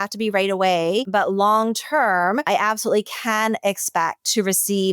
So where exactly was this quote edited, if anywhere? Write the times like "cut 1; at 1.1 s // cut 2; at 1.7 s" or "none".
cut 1; at 1.1 s // cut 2; at 2.5 s